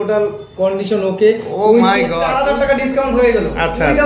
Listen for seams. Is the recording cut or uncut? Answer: cut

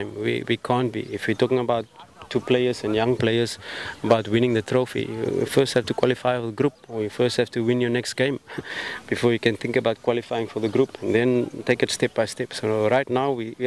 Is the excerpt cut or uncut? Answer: uncut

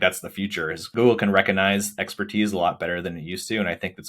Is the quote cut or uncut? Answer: cut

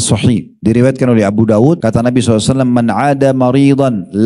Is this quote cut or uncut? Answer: cut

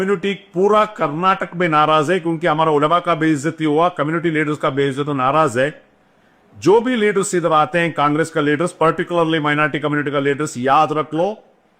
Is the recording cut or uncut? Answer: uncut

